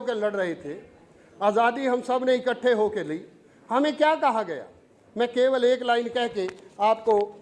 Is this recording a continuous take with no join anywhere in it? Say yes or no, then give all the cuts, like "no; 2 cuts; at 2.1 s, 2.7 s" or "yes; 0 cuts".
yes; 0 cuts